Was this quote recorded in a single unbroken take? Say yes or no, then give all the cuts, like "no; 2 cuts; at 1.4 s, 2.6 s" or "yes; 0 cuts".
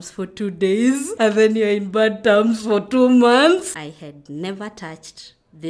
no; 2 cuts; at 1.1 s, 3.7 s